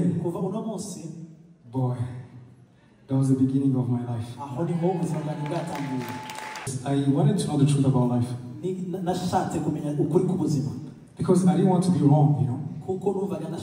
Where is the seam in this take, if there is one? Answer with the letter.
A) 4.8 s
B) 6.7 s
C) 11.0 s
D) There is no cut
B